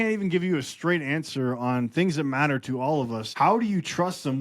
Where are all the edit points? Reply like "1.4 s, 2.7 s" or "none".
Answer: 3.2 s